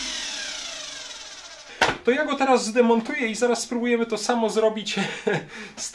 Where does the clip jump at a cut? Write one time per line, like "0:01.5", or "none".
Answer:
0:01.6